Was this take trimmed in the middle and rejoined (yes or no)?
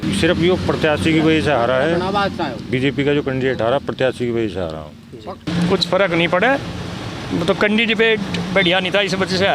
yes